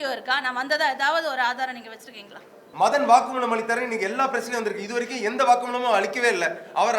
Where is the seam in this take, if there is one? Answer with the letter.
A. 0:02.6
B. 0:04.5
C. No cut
A